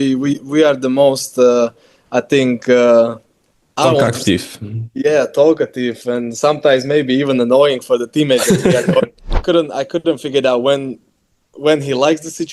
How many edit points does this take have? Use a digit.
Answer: 1